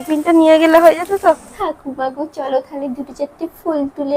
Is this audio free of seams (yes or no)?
no